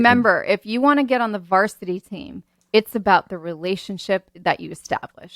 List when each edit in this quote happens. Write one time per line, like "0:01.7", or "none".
0:04.3

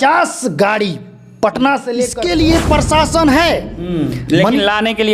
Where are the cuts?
0:02.1

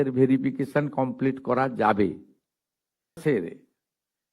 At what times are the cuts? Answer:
0:03.2

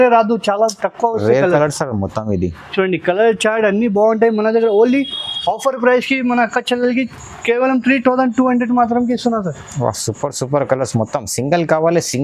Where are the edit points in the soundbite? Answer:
none

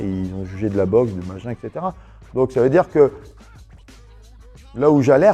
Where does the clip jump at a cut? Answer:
none

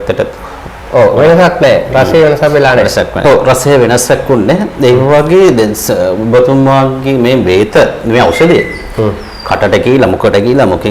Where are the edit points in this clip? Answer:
none

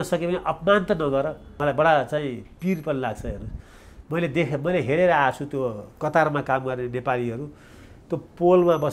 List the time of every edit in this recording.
0:01.5

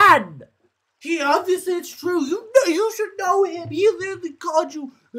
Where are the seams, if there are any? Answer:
none

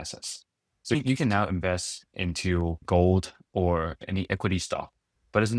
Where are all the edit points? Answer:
0:00.9
0:02.8
0:04.0

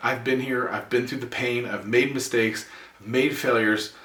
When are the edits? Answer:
none

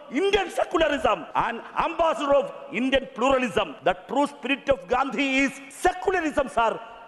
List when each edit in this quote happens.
0:01.3
0:03.7
0:05.6

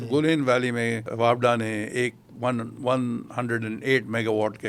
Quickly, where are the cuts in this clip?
0:01.1

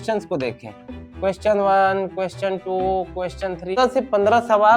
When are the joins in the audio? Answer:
0:03.7

